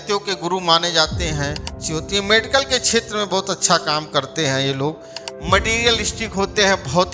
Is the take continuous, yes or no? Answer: no